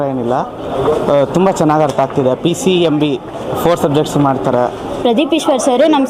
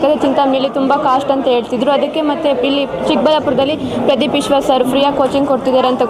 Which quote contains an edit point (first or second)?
first